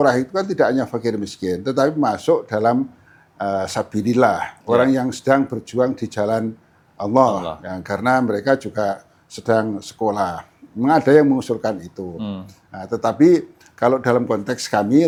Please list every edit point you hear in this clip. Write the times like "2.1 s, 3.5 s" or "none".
none